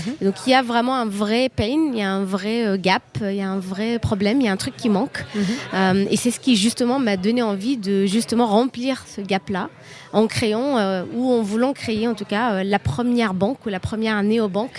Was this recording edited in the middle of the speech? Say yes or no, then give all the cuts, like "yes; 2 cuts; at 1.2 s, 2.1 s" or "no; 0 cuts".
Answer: no; 0 cuts